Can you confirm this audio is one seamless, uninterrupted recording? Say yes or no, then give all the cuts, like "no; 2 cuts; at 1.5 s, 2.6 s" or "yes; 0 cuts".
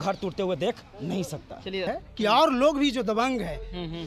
no; 1 cut; at 1.9 s